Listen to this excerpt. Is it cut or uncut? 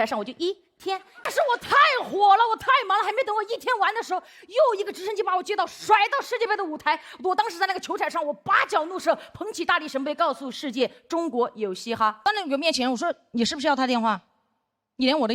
cut